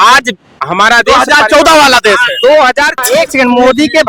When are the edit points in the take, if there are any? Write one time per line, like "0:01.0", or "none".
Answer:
0:03.0